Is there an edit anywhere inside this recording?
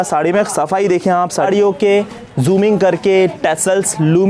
yes; 1 cut; at 1.5 s

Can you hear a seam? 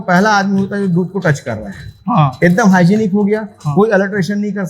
no; 0 cuts

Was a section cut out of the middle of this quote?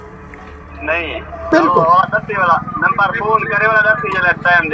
yes; 1 cut; at 1.4 s

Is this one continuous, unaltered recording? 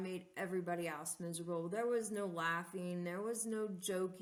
yes; 0 cuts

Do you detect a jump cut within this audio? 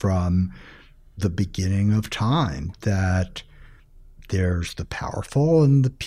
no; 0 cuts

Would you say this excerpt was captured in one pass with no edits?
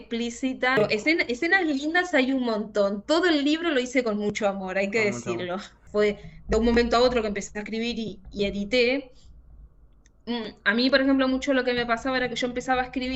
no; 2 cuts; at 0.8 s, 5.7 s

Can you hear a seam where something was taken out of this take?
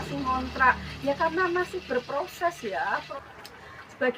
yes; 1 cut; at 3.1 s

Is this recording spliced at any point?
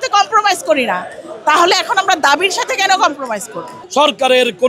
yes; 1 cut; at 3.8 s

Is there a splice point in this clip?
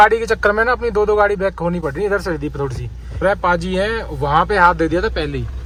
no; 0 cuts

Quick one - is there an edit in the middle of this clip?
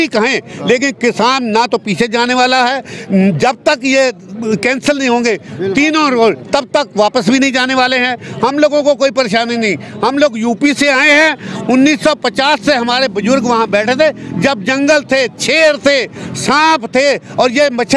no; 0 cuts

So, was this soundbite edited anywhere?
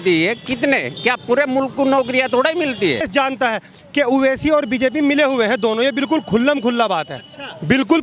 yes; 1 cut; at 3.1 s

